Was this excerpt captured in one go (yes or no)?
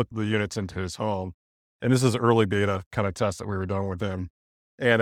yes